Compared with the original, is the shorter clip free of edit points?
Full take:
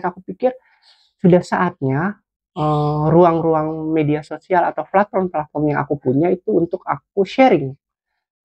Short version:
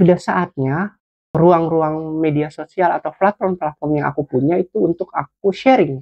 no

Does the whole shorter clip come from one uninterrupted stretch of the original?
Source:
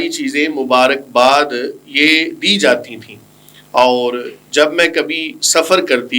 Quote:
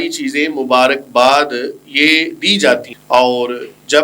no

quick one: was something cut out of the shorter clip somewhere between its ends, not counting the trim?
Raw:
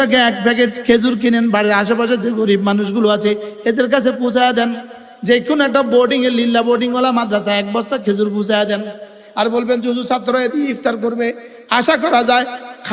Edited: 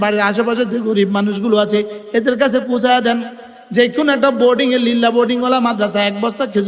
no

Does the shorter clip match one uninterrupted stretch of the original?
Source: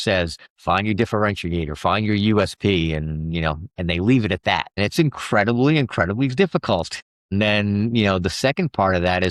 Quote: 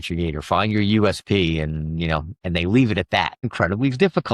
no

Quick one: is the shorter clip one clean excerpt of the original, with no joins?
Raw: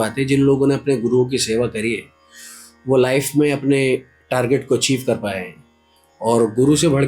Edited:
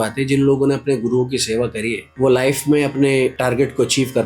no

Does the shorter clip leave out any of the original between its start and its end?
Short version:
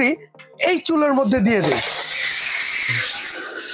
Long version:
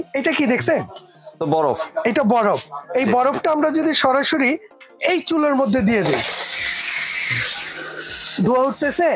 no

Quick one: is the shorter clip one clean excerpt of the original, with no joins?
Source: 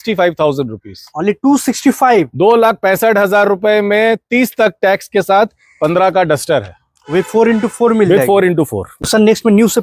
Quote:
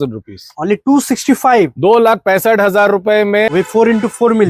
no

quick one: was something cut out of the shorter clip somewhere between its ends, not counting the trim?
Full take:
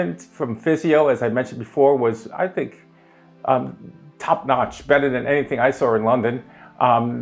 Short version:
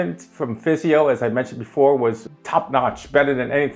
yes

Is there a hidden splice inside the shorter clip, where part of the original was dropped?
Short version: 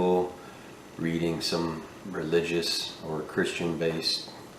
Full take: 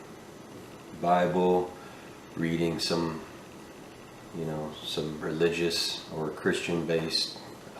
yes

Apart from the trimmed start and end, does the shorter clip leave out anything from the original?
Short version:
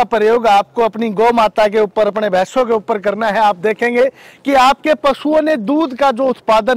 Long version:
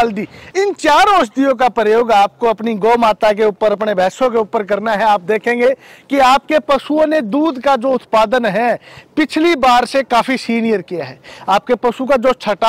no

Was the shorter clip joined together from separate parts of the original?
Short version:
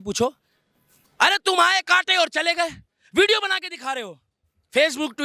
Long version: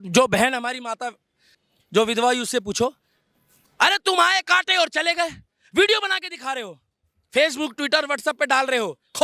no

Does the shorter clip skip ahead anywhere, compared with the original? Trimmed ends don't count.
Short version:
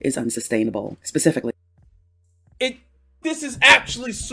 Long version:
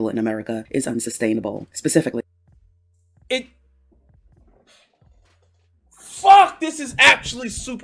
yes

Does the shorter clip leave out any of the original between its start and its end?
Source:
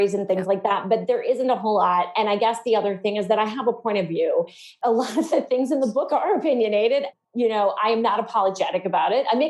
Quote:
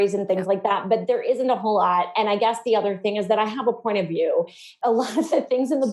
no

